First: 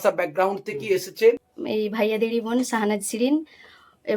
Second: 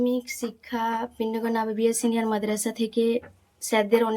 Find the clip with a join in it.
first; 1 cut; at 1.5 s

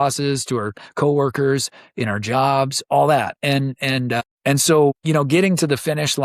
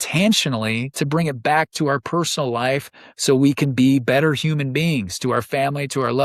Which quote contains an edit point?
first; 2 cuts; at 4.3 s, 5.0 s

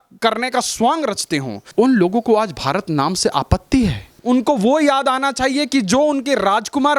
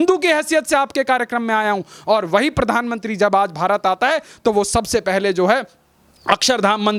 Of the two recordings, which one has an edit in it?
first; 2 cuts; at 1.6 s, 4.1 s

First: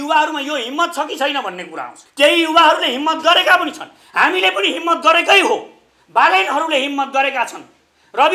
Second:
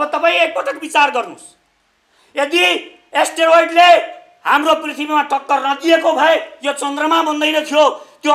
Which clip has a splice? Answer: first; 1 cut; at 2.0 s

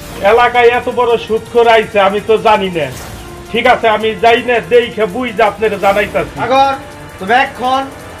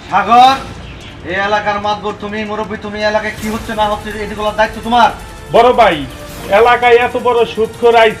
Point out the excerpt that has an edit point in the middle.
second; 1 cut; at 5.3 s

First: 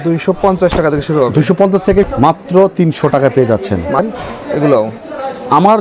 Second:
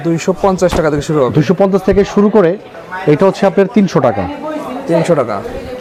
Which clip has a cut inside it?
first; 2 cuts; at 2.1 s, 4.0 s

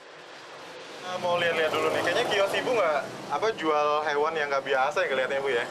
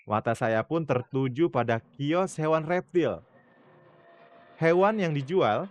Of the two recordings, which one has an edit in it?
first; 1 cut; at 1.1 s

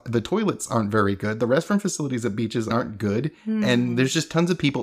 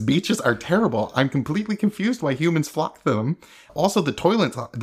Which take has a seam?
first; 1 cut; at 2.7 s

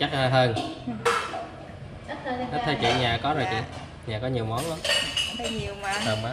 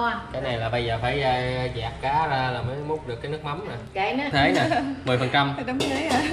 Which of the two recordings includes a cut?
second; 1 cut; at 4.3 s

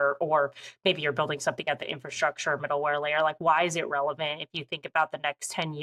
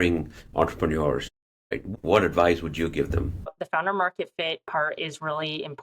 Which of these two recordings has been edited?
second; 2 cuts; at 1.6 s, 3.5 s

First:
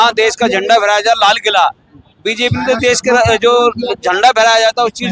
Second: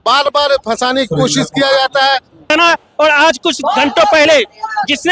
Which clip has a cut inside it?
second; 1 cut; at 2.5 s

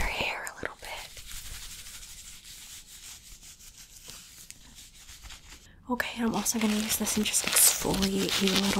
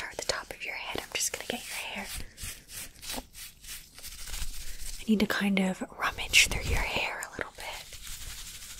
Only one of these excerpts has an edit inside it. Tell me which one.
first; 1 cut; at 5.7 s

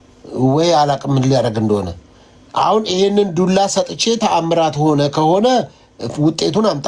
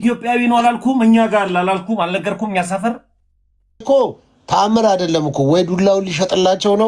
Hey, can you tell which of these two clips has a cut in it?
second; 1 cut; at 3.8 s

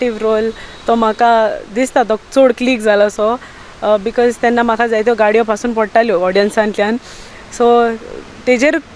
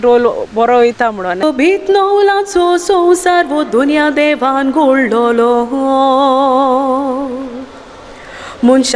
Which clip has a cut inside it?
second; 1 cut; at 1.4 s

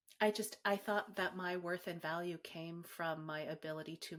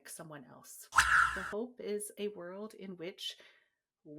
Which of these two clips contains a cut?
second; 1 cut; at 1.2 s

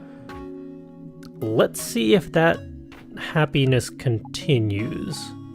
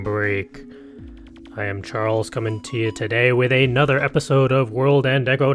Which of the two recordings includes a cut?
first; 1 cut; at 3.2 s

